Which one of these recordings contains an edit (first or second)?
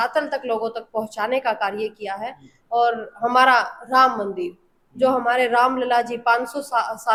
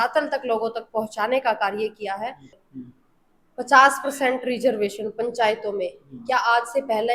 second